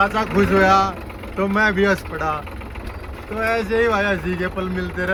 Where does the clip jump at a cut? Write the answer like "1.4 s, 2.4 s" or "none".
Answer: none